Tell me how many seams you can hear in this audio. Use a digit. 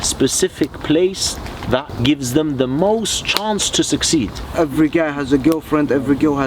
2